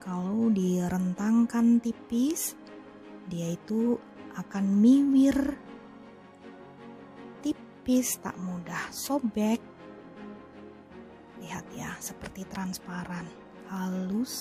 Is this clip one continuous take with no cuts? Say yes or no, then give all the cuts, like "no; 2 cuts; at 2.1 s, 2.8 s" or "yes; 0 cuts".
no; 4 cuts; at 5.6 s, 7.4 s, 9.6 s, 11.5 s